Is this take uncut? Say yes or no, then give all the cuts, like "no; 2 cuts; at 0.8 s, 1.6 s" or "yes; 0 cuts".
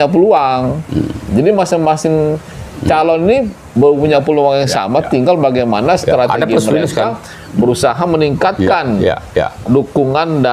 yes; 0 cuts